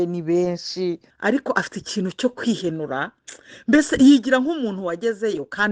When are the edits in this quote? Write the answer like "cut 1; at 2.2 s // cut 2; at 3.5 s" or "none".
cut 1; at 1.1 s